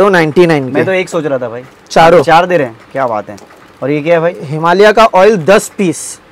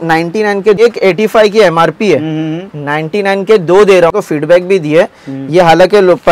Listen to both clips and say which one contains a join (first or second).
second